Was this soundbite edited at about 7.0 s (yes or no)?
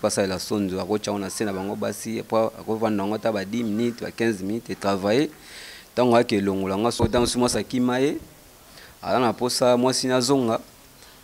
yes